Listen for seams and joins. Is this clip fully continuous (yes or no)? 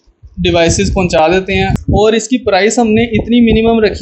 no